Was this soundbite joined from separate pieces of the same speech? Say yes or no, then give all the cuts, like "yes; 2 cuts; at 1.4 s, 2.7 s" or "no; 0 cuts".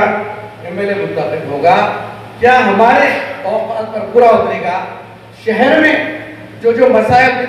no; 0 cuts